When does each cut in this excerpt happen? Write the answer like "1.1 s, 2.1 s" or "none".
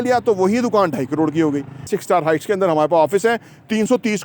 1.9 s